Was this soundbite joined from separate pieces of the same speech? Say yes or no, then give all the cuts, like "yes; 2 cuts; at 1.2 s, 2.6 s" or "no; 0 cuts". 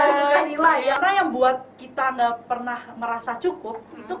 yes; 1 cut; at 1.0 s